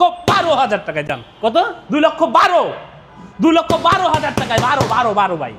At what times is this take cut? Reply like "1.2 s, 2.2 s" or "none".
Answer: none